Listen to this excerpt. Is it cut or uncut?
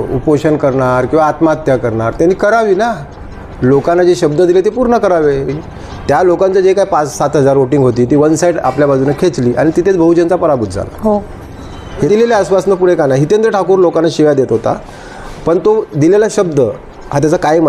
cut